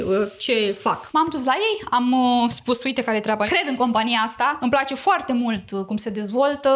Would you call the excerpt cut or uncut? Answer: cut